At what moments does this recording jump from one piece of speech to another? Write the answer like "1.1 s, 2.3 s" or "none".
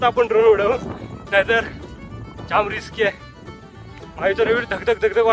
none